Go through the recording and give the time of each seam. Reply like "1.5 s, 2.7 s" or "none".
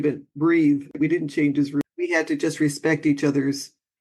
0.9 s, 1.9 s